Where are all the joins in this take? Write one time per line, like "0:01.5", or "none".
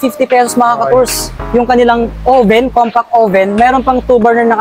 none